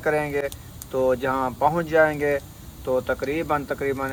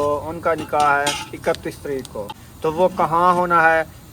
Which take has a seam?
second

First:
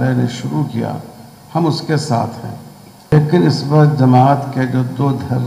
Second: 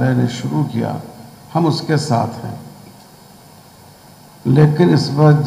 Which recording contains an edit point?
first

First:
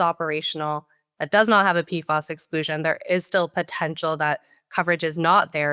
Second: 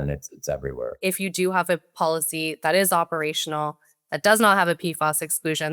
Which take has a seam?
second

